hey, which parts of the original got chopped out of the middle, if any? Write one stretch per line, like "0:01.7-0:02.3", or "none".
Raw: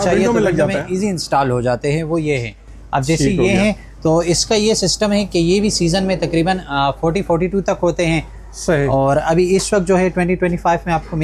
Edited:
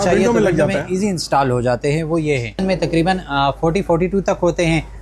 0:02.6-0:06.0